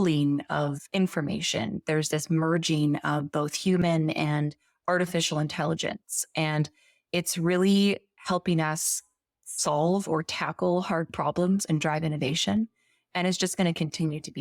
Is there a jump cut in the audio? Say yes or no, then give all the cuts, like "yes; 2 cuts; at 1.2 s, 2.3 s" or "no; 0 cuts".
no; 0 cuts